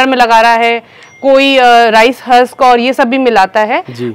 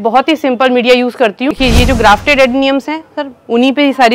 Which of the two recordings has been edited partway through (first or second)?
second